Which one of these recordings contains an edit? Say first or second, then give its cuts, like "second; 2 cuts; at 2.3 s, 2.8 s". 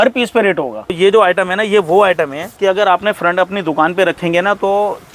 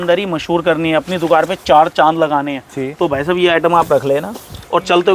first; 2 cuts; at 0.9 s, 2.4 s